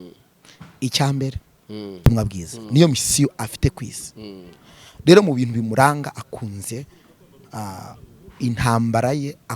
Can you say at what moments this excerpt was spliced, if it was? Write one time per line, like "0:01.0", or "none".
0:02.1